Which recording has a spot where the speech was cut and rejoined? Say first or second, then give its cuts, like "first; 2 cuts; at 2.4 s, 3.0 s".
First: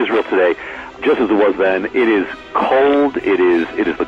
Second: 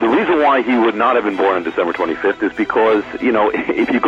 first; 1 cut; at 1.0 s